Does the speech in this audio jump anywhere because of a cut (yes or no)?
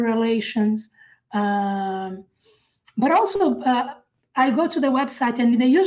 no